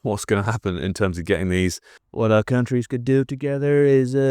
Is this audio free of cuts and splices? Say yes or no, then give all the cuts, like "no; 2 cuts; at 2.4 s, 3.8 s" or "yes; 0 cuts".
no; 1 cut; at 1.9 s